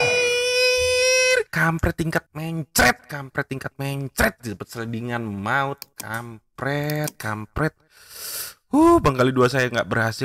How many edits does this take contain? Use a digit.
2